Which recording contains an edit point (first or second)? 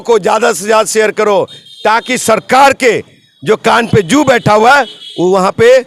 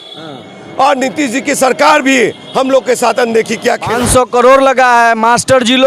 second